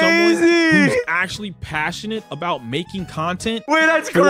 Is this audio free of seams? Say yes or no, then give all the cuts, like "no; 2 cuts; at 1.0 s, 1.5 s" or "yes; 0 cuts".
yes; 0 cuts